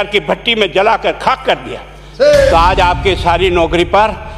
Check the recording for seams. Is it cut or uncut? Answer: cut